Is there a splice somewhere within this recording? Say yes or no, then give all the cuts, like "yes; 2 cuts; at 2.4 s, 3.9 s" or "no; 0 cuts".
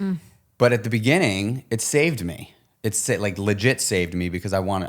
no; 0 cuts